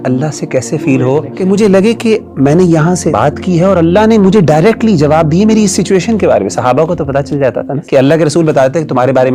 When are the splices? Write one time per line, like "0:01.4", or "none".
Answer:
0:01.3
0:03.1
0:07.8